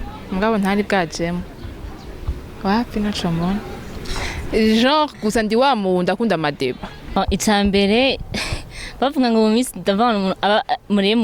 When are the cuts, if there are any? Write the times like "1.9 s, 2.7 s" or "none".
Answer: 7.0 s